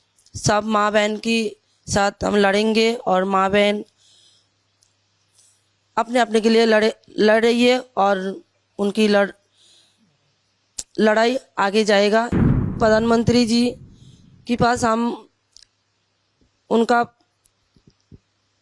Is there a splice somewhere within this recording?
yes; 1 cut; at 12.8 s

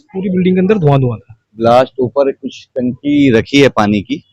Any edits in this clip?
yes; 1 cut; at 1.5 s

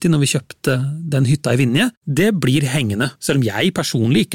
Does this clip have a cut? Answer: yes; 3 cuts; at 0.8 s, 2.0 s, 3.1 s

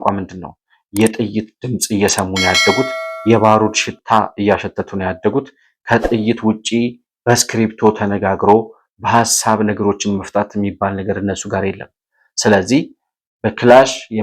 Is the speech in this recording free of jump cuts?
yes; 0 cuts

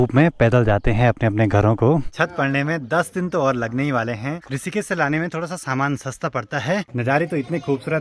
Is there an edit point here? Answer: yes; 3 cuts; at 2.1 s, 4.5 s, 6.9 s

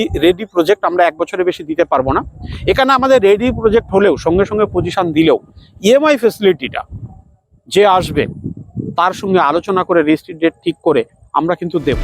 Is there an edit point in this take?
no; 0 cuts

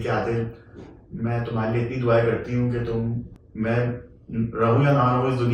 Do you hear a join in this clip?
yes; 1 cut; at 3.4 s

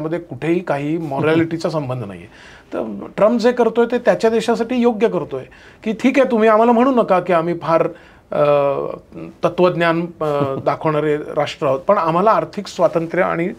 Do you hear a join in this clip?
no; 0 cuts

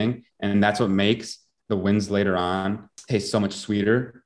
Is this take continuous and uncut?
no; 1 cut; at 2.9 s

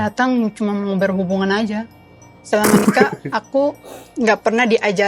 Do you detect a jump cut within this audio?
no; 0 cuts

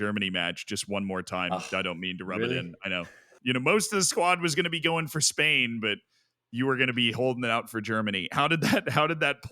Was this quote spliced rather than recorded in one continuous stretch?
yes; 1 cut; at 3.3 s

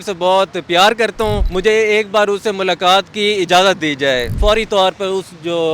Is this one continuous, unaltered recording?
no; 2 cuts; at 1.5 s, 4.4 s

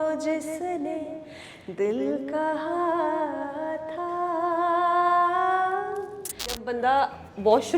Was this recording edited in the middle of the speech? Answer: yes; 1 cut; at 6.7 s

